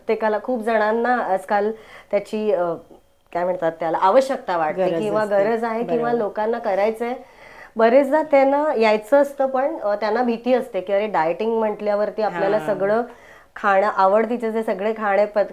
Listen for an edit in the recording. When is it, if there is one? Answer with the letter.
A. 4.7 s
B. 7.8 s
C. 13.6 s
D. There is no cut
D